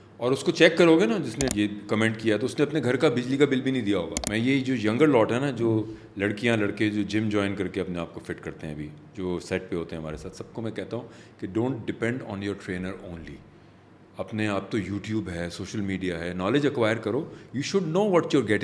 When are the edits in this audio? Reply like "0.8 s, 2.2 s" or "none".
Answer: 1.5 s, 4.2 s

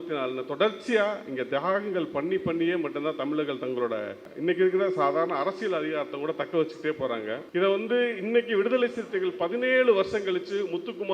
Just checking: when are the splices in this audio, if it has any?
4.2 s, 7.4 s

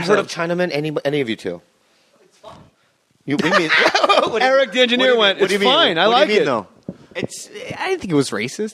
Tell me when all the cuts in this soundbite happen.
7.4 s

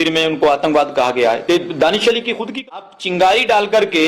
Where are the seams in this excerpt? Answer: 2.8 s

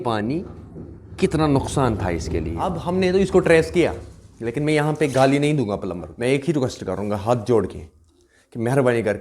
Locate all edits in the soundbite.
2.8 s, 6.1 s

